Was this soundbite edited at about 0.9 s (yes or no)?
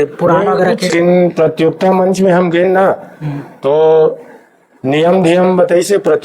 yes